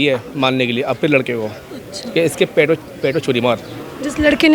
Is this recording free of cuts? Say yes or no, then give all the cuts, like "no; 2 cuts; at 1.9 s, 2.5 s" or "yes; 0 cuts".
yes; 0 cuts